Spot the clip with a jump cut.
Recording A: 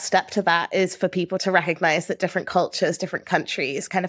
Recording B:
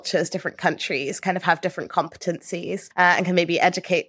A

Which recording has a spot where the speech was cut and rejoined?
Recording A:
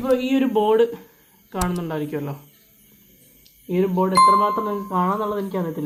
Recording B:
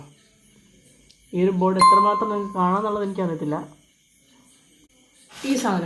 B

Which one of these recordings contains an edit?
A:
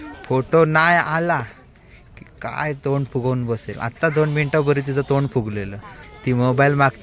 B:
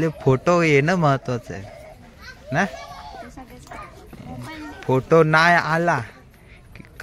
A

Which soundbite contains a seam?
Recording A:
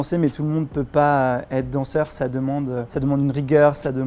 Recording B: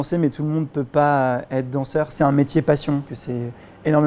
B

